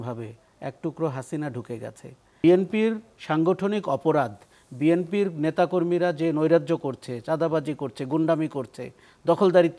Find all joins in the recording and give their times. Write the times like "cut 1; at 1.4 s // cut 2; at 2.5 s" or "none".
cut 1; at 2.4 s